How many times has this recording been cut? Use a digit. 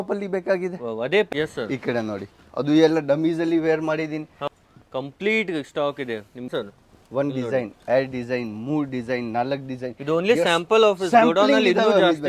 3